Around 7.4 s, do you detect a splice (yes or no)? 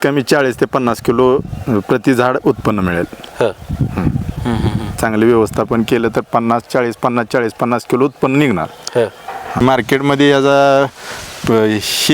no